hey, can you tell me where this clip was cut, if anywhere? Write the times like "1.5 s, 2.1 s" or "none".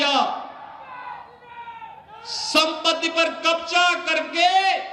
none